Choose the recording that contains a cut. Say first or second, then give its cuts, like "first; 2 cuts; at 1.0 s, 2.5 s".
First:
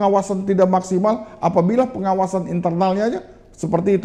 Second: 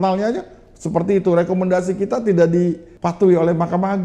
second; 1 cut; at 2.9 s